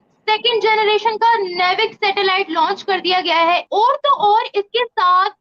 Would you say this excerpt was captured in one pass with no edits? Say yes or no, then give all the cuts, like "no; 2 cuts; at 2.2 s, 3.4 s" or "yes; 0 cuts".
no; 1 cut; at 3.6 s